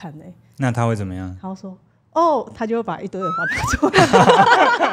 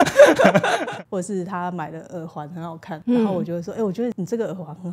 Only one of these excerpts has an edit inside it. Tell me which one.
second; 3 cuts; at 0.8 s, 3.0 s, 4.1 s

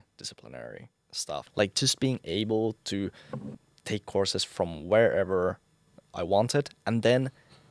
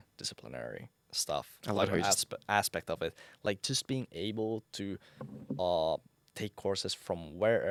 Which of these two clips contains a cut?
first; 3 cuts; at 1.4 s, 3.6 s, 6.0 s

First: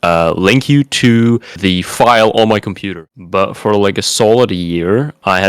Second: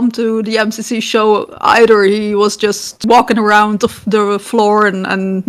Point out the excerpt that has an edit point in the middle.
first; 1 cut; at 3.0 s

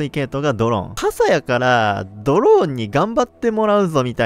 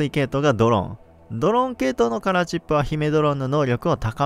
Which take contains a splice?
first; 1 cut; at 0.9 s

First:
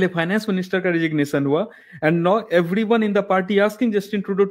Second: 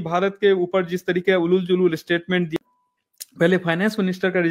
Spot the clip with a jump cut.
second; 1 cut; at 2.5 s

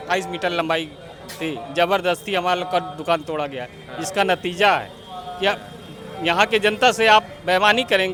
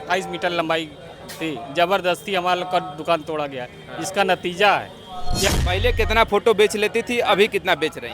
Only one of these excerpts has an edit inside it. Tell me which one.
second; 1 cut; at 5.5 s

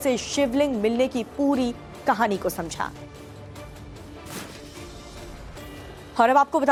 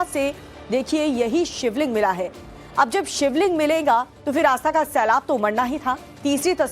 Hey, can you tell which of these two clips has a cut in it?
second; 1 cut; at 3.8 s

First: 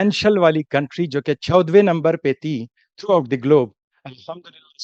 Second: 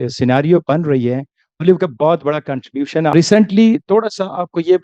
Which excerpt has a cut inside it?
second; 1 cut; at 3.1 s

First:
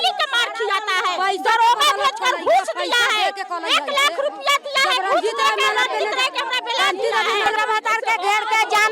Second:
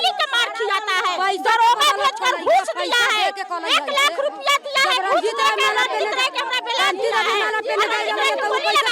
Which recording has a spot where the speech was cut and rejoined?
first; 1 cut; at 7.5 s

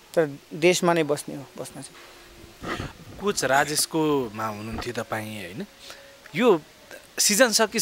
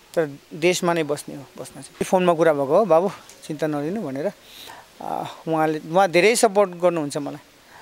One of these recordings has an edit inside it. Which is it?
second; 1 cut; at 2.0 s

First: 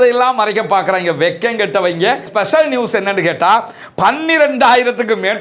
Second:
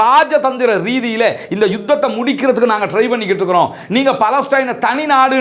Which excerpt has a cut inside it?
first; 1 cut; at 2.3 s

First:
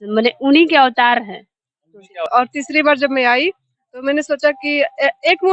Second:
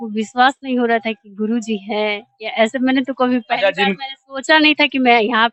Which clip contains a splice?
first; 1 cut; at 2.1 s

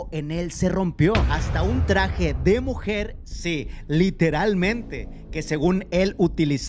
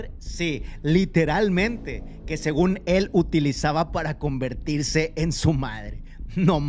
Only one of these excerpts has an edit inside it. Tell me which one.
first; 1 cut; at 1.3 s

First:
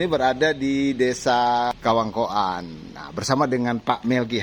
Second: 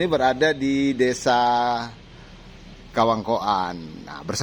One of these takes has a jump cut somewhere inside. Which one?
first; 1 cut; at 1.7 s

